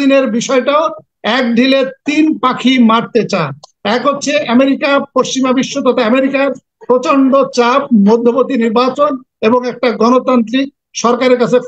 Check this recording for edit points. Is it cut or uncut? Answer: uncut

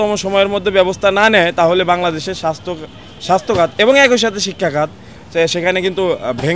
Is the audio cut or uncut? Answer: uncut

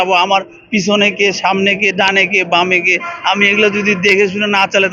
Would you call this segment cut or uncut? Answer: uncut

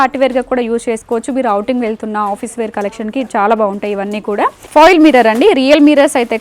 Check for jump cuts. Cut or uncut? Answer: cut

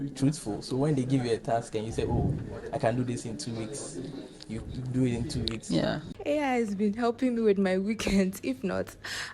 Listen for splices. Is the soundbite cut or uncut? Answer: cut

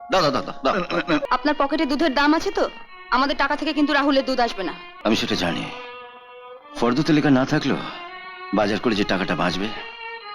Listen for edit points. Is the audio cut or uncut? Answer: cut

